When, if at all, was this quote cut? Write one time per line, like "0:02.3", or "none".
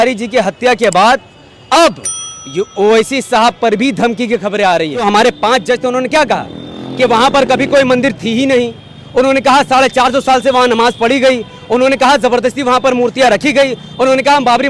0:05.0